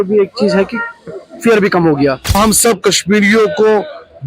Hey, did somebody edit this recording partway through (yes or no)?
yes